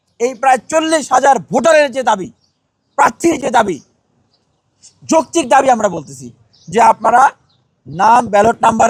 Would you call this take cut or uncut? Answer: uncut